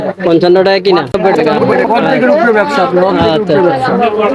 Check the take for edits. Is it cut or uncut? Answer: cut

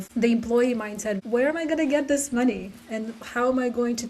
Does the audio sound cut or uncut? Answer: cut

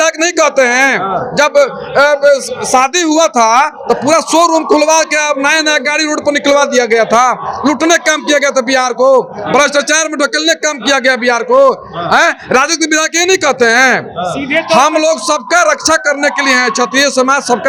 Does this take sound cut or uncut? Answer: uncut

